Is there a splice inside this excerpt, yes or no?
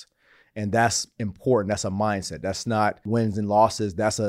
yes